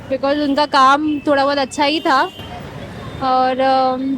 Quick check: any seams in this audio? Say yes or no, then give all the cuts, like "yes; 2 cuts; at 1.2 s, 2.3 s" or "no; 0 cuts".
no; 0 cuts